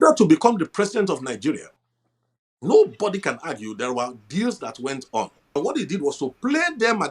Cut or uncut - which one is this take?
cut